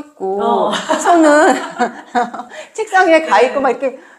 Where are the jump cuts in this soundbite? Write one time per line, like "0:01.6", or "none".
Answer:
none